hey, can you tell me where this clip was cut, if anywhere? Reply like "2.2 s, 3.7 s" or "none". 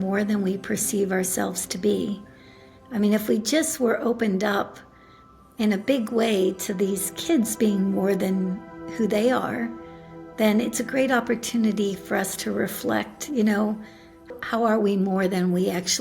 14.3 s